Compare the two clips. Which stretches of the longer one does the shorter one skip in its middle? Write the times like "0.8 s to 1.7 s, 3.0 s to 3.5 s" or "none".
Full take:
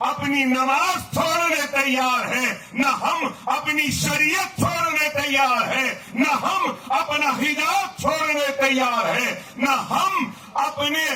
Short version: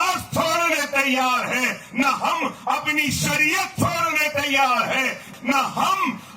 6.0 s to 9.4 s

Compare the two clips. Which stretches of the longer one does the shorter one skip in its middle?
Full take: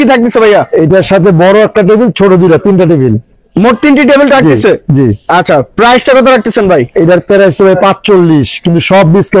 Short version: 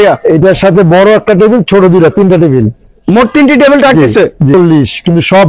5.0 s to 8.1 s

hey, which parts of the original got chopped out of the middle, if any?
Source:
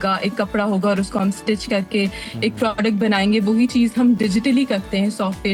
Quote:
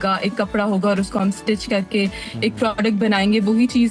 none

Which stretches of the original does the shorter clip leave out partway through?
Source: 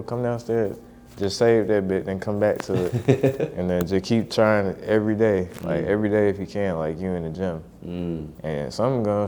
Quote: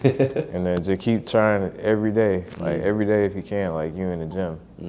none

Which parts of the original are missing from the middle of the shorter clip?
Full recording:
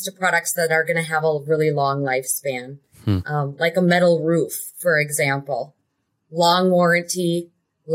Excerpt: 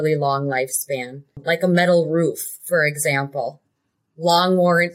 2.9 s to 3.5 s

